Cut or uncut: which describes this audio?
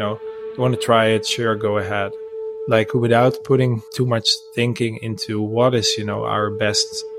cut